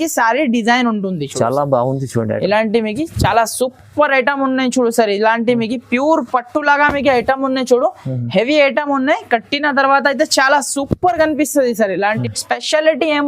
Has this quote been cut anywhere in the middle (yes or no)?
yes